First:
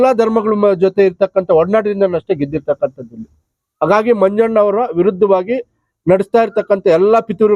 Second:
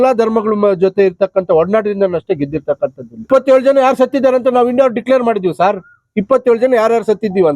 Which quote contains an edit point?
second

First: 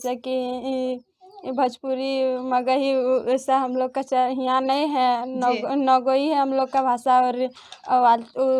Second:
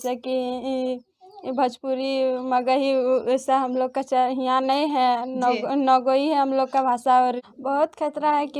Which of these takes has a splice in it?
second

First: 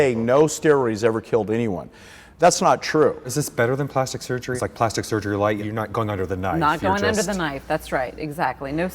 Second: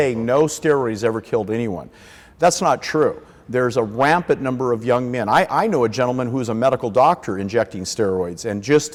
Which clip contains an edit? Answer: first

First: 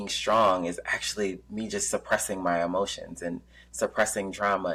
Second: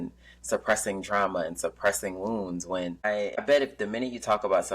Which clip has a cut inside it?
second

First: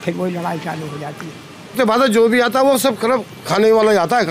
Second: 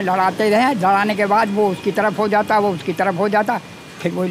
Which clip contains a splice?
first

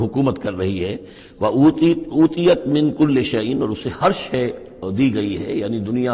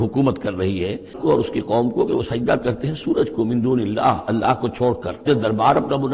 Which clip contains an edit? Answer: second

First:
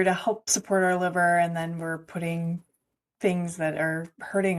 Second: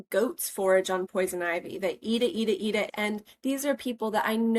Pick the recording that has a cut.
second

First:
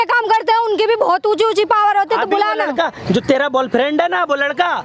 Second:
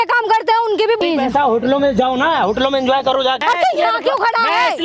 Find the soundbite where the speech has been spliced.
second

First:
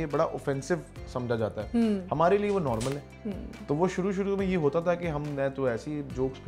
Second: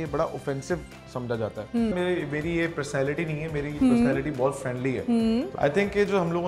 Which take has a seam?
second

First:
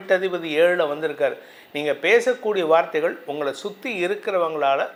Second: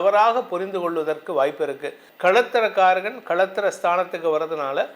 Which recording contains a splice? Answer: second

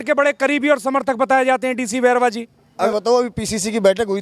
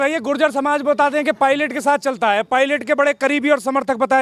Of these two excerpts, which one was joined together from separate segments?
first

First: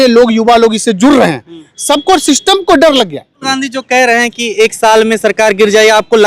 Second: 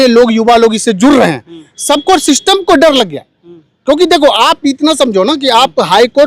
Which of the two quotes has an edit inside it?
first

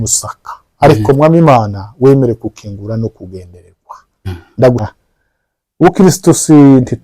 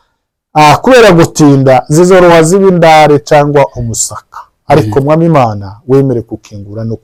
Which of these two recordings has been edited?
first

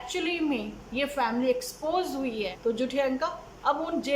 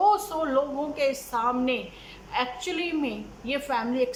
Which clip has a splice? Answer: first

